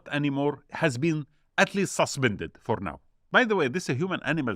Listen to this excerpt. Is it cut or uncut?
cut